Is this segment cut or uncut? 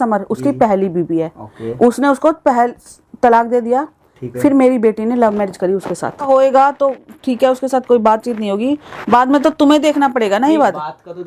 cut